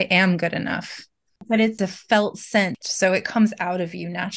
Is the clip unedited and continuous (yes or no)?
no